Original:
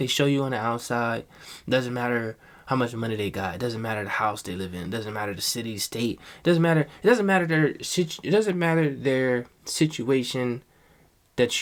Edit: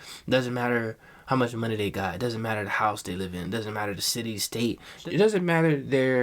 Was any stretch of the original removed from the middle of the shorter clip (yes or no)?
yes